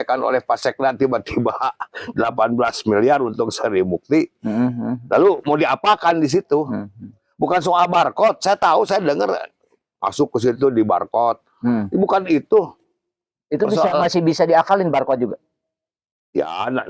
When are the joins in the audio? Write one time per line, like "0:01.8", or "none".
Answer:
none